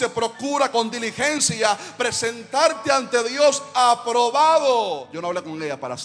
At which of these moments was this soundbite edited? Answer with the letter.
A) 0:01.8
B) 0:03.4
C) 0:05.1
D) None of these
C